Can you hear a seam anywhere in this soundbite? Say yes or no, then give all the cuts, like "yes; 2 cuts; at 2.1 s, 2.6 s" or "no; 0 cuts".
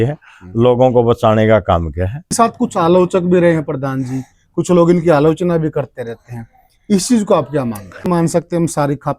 yes; 2 cuts; at 2.3 s, 8.1 s